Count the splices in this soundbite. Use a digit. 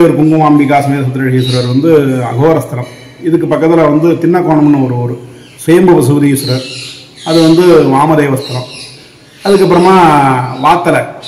0